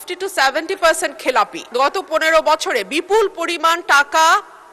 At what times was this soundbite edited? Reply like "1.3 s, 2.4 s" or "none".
1.7 s